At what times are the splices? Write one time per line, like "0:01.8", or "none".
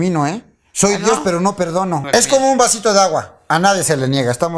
0:02.0